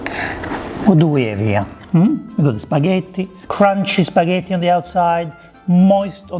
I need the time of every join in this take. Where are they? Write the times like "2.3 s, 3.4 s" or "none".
3.3 s